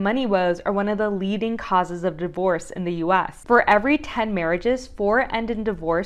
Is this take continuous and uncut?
yes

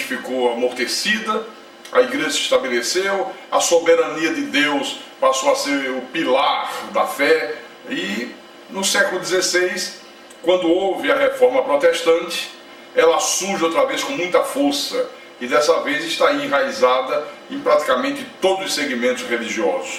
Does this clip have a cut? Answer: no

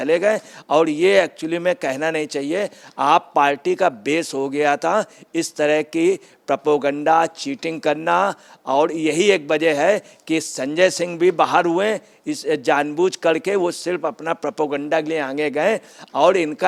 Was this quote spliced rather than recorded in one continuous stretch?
no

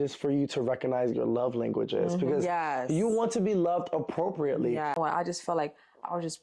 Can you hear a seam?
yes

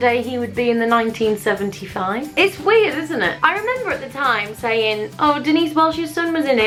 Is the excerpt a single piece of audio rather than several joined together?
yes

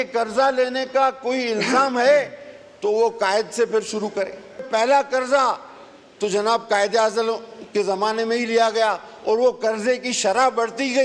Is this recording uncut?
no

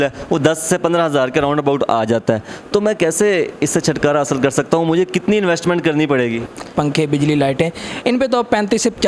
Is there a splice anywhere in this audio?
yes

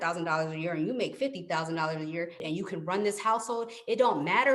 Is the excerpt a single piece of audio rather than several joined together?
no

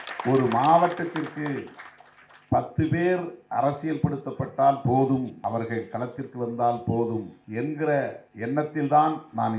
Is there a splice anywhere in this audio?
yes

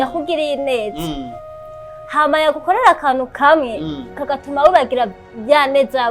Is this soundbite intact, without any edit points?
yes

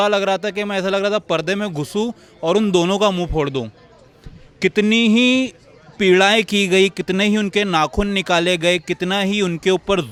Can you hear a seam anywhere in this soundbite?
no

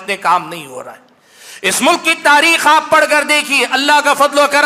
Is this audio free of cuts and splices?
yes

